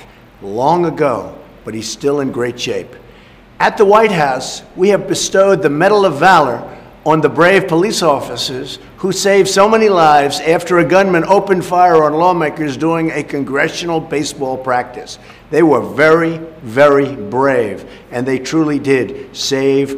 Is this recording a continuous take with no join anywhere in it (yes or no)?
yes